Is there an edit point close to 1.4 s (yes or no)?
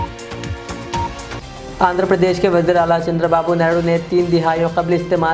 no